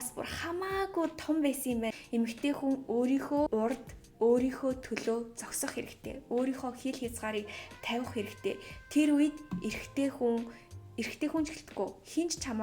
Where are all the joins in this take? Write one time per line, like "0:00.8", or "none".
0:02.0
0:03.5